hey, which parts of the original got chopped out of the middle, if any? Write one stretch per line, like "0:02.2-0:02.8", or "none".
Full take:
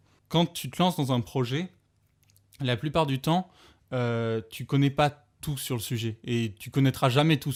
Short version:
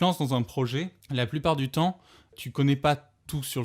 0:01.8-0:02.5
0:03.8-0:04.5